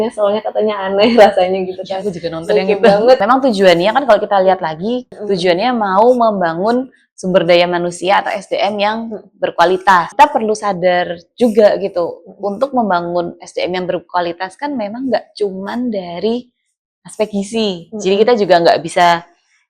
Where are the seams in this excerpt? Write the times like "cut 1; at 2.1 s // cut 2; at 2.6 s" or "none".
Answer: cut 1; at 3.2 s // cut 2; at 5.1 s // cut 3; at 10.1 s